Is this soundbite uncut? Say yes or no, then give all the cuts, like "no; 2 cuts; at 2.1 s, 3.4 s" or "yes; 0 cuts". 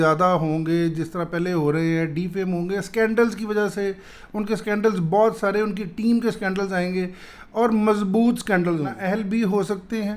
no; 1 cut; at 9.0 s